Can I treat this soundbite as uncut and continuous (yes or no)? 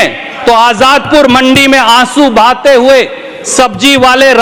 yes